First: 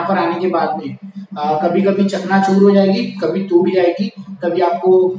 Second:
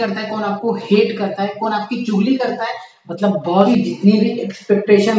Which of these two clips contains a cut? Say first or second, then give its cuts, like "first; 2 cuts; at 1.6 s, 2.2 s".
second; 1 cut; at 3.7 s